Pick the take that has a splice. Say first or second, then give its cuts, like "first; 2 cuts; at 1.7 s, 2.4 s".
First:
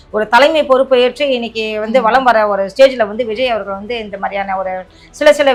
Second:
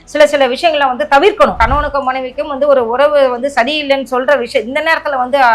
second; 1 cut; at 1.6 s